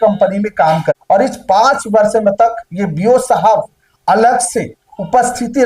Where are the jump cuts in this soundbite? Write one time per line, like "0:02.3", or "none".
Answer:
0:01.0